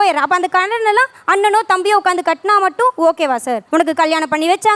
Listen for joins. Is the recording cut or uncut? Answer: cut